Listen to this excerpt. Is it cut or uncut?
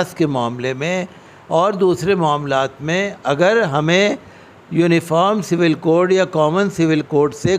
uncut